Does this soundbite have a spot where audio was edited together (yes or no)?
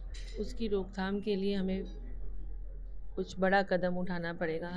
no